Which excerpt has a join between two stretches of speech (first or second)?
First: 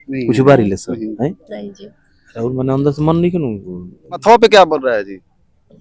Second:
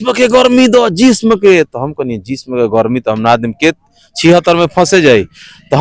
first